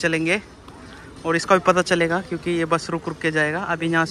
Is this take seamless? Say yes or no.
yes